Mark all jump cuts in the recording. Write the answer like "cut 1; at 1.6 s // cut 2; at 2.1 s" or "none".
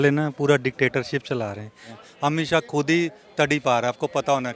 cut 1; at 1.9 s

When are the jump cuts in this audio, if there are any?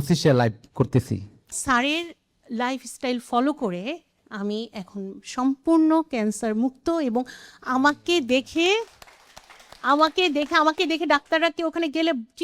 cut 1; at 1.6 s

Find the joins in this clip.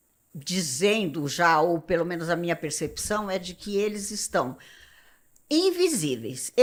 none

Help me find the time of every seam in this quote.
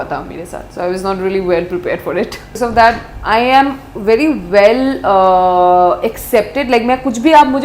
cut 1; at 2.5 s

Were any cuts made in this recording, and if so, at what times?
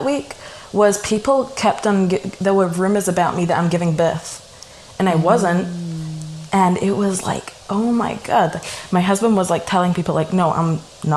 none

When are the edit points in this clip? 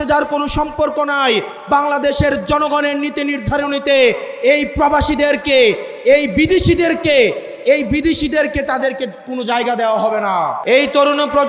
cut 1; at 10.6 s

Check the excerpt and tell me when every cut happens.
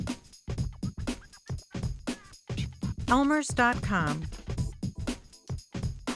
cut 1; at 3.1 s // cut 2; at 4.2 s

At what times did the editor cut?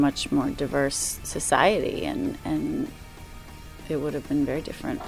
cut 1; at 3.1 s

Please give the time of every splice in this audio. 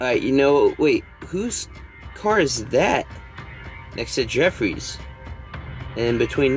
none

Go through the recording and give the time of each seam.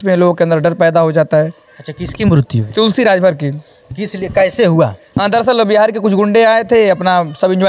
none

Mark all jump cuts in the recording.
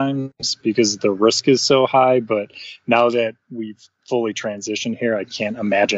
none

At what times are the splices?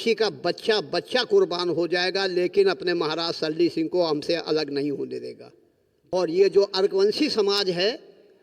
cut 1; at 6.1 s

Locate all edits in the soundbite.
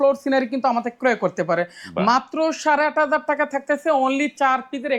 none

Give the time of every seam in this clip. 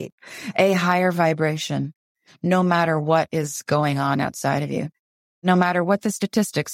cut 1; at 5.0 s

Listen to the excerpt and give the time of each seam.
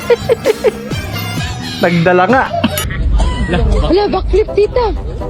cut 1; at 2.9 s

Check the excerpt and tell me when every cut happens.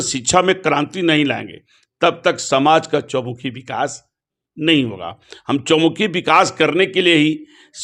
none

